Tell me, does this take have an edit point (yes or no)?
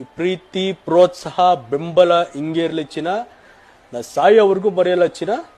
no